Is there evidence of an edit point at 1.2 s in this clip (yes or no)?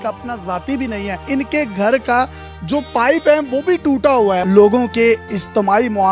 yes